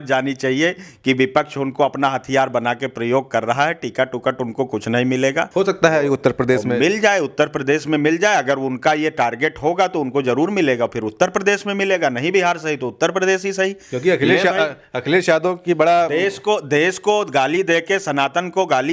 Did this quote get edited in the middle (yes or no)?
no